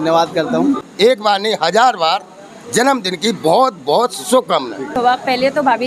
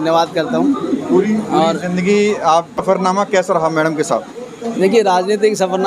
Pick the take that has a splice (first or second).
first